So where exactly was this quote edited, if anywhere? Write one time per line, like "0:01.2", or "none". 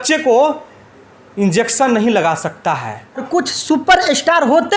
0:03.2

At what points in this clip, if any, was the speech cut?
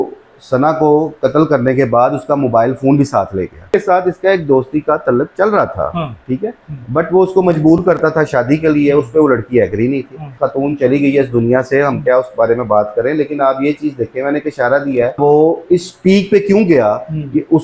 0:03.7
0:10.4
0:15.2

